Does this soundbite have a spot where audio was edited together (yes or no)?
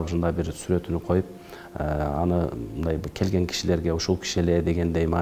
no